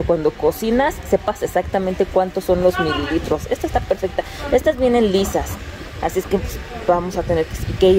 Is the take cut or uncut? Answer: uncut